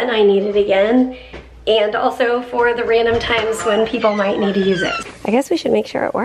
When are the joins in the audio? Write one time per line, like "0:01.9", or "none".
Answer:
0:05.0